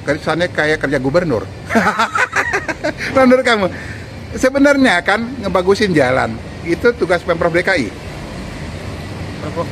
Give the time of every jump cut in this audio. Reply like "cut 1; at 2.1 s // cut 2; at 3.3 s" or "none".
none

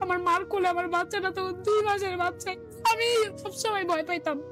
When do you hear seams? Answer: cut 1; at 2.4 s // cut 2; at 3.5 s

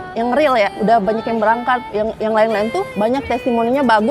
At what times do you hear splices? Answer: cut 1; at 0.8 s // cut 2; at 2.9 s

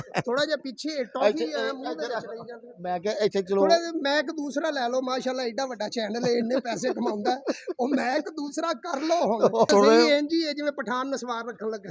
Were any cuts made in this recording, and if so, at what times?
cut 1; at 9.7 s

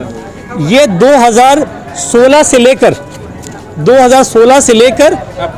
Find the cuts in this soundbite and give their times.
none

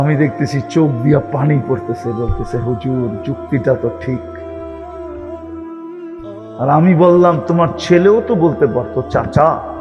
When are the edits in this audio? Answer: none

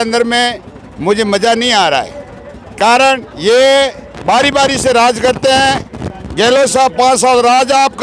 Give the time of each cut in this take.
none

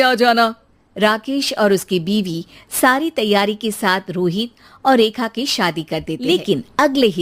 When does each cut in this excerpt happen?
cut 1; at 6.2 s

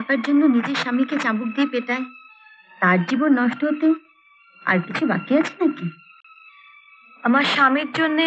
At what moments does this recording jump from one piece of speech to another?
none

